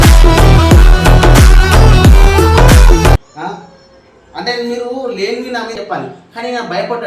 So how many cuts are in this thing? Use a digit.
1